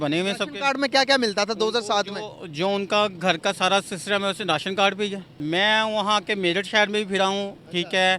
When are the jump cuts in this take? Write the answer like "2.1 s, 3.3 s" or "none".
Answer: 5.3 s